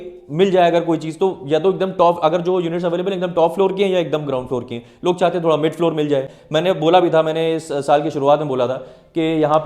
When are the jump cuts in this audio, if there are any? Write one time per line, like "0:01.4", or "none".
0:06.4